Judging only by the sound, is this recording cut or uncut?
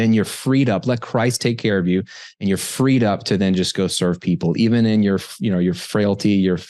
uncut